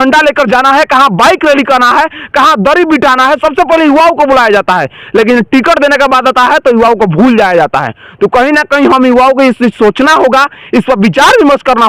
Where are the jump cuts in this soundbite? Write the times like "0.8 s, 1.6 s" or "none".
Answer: none